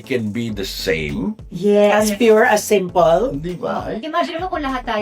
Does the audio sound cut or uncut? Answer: cut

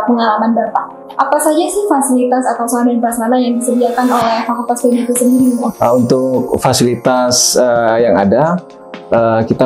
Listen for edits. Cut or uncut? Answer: cut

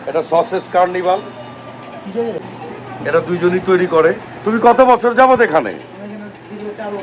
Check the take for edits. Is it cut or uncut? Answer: cut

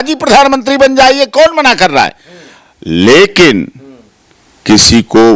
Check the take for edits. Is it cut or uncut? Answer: uncut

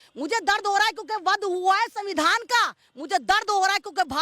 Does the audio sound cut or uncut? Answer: uncut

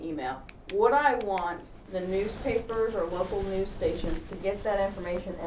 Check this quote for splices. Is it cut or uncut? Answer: uncut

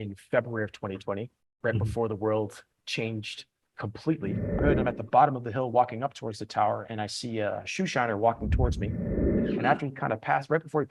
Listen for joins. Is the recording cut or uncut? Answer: cut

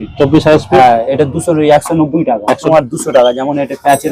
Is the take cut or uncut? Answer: cut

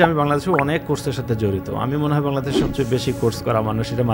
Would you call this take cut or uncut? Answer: uncut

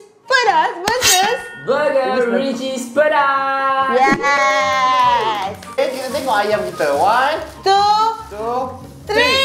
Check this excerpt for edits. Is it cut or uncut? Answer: cut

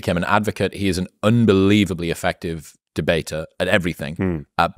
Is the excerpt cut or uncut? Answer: uncut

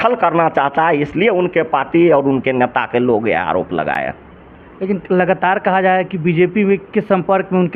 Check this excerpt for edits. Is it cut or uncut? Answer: uncut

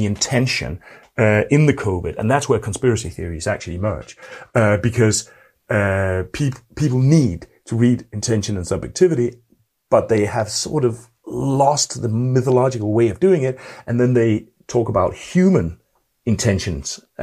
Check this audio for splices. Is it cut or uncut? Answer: uncut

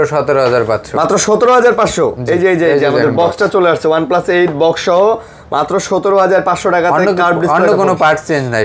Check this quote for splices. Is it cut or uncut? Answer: uncut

